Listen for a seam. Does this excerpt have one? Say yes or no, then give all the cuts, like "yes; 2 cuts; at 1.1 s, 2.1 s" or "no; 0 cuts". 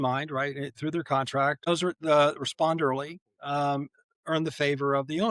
yes; 1 cut; at 1.7 s